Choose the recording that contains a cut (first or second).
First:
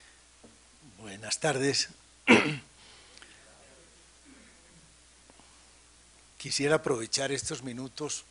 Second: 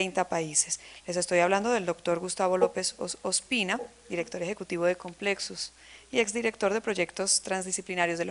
second